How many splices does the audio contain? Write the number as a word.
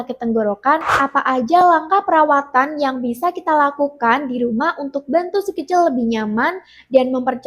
one